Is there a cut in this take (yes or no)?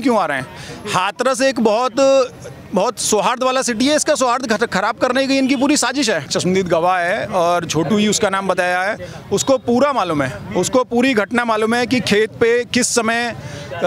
yes